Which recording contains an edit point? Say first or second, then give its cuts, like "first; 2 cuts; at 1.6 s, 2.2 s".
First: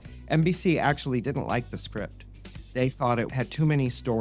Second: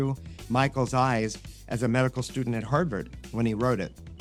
first; 1 cut; at 3.3 s